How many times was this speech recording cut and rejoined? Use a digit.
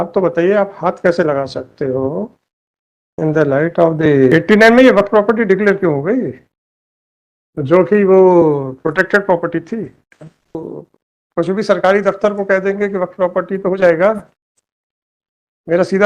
2